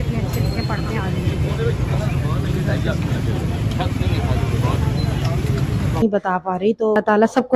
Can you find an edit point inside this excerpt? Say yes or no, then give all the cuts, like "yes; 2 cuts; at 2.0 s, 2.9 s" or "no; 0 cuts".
yes; 1 cut; at 6.0 s